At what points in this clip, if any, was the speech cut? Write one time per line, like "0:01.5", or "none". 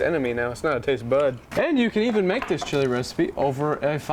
0:01.4